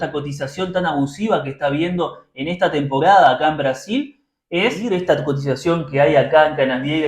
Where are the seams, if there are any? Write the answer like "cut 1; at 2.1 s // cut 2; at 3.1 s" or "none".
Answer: cut 1; at 4.8 s